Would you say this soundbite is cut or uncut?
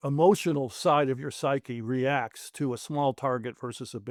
uncut